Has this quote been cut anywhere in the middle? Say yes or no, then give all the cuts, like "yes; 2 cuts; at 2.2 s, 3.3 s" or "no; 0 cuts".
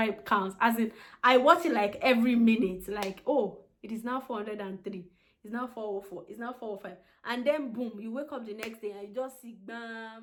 no; 0 cuts